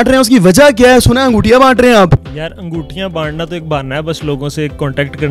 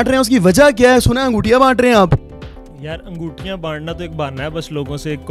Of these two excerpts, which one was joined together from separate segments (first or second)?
first